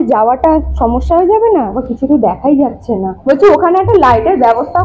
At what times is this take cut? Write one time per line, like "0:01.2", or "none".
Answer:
0:01.8
0:03.1